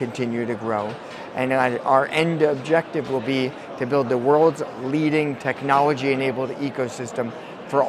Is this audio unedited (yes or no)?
yes